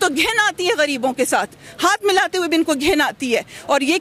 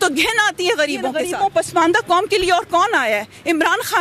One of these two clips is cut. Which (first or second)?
second